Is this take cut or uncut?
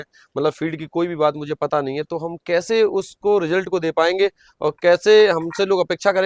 uncut